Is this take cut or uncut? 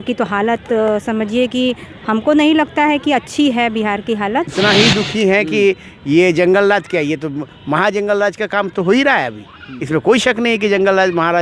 cut